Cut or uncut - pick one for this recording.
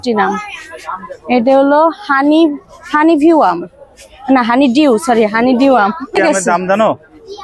cut